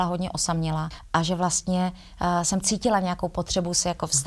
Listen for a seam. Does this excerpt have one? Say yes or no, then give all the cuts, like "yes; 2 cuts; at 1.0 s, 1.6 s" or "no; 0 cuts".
yes; 1 cut; at 0.9 s